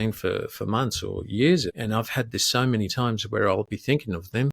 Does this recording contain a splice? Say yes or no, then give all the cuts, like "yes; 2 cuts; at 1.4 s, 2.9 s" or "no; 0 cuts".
yes; 1 cut; at 1.7 s